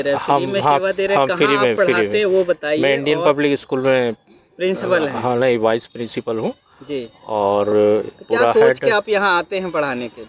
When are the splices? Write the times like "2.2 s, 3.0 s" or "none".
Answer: none

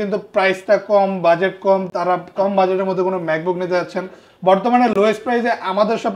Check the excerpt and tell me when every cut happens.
none

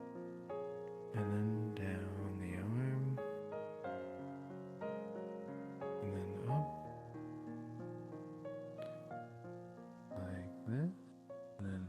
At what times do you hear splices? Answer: none

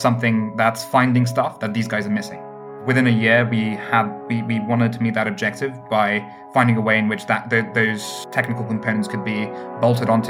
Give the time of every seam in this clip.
2.8 s

